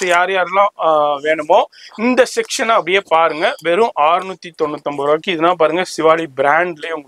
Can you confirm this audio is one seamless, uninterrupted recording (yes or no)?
yes